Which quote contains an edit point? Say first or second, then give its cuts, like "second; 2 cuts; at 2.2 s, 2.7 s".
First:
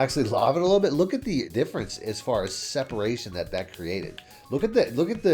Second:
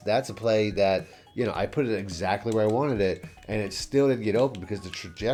first; 2 cuts; at 1.5 s, 4.3 s